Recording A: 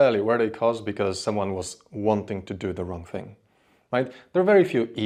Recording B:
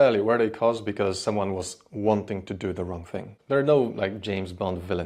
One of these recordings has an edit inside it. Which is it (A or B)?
B